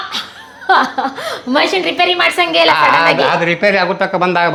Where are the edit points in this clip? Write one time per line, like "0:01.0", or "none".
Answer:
none